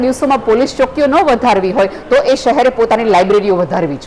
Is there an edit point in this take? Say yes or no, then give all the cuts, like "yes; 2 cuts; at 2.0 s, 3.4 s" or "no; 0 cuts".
no; 0 cuts